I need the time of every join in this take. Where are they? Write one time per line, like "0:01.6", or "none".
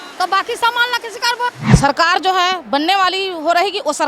0:01.6